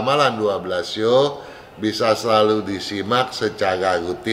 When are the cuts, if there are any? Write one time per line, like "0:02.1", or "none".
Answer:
none